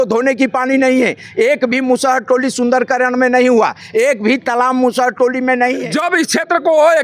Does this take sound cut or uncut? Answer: cut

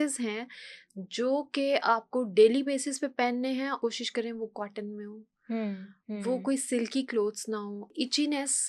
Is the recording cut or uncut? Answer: cut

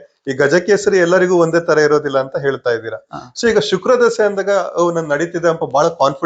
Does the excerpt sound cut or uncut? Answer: uncut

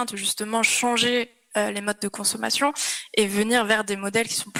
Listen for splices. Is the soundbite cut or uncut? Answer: uncut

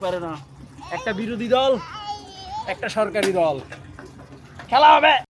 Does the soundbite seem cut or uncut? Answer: uncut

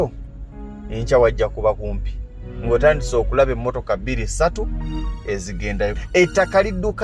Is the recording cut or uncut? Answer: cut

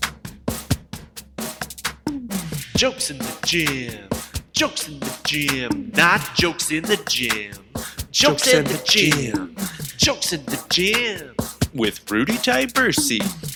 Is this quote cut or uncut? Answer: uncut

